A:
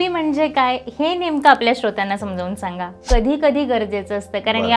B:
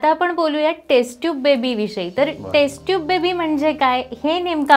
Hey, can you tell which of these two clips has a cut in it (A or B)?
A